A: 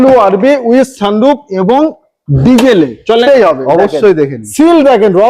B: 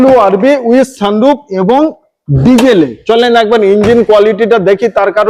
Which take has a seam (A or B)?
A